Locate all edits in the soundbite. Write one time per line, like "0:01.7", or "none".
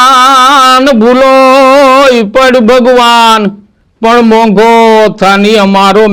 none

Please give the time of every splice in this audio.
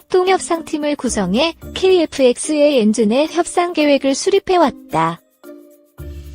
0:05.3

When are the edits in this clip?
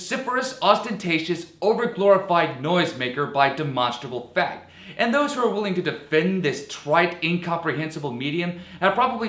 0:03.7

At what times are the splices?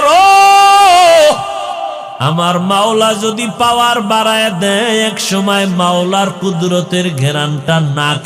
none

